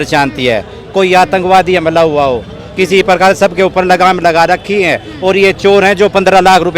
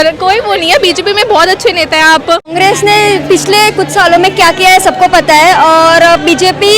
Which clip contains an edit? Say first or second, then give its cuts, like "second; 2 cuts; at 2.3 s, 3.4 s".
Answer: second; 1 cut; at 2.5 s